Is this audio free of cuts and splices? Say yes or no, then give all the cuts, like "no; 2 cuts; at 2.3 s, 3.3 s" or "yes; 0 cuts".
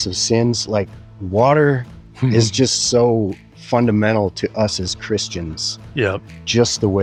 yes; 0 cuts